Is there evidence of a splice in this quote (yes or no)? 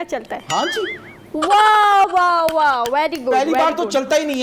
no